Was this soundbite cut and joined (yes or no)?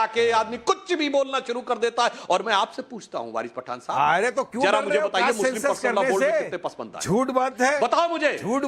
no